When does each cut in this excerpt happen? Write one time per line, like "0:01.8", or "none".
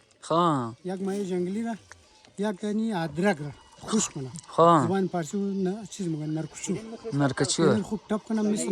none